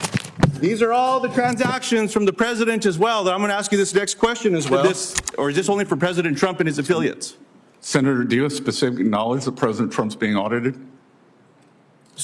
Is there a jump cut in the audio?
yes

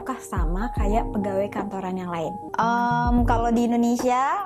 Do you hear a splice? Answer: yes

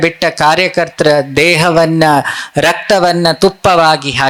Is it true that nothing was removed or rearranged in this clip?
yes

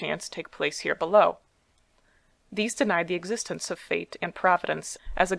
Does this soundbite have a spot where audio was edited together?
yes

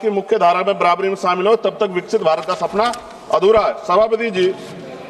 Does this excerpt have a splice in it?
no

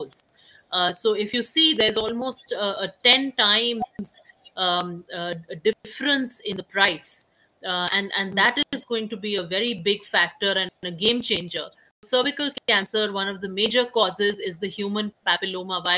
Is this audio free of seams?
no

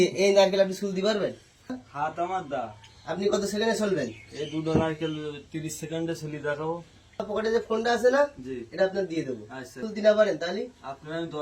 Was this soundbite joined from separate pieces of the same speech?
yes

